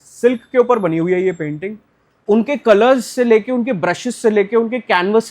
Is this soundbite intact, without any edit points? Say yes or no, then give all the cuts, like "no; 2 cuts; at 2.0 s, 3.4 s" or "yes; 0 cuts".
no; 1 cut; at 2.1 s